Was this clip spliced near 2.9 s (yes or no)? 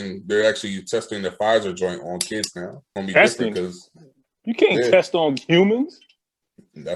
yes